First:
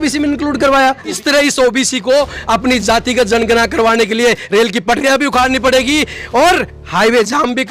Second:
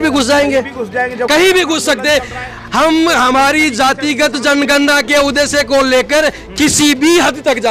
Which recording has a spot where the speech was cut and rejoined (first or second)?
first